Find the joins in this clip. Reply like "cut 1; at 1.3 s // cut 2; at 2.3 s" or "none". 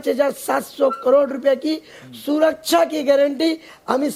none